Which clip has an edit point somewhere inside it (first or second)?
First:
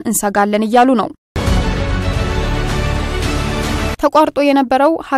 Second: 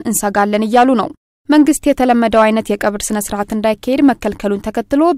first